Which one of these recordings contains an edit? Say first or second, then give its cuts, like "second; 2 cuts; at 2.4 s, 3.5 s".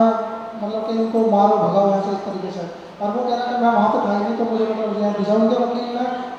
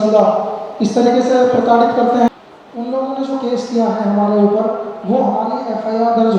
second; 1 cut; at 2.3 s